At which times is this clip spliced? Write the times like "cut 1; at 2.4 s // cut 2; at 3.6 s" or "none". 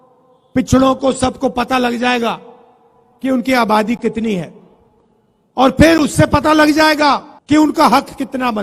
cut 1; at 7.3 s